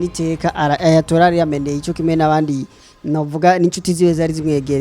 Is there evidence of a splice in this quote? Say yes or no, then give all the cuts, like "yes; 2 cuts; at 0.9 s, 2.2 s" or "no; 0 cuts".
no; 0 cuts